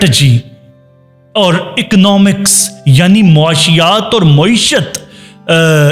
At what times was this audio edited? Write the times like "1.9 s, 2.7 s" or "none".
none